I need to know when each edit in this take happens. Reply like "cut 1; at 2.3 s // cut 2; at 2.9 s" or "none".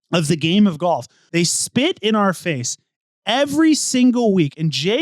cut 1; at 1.2 s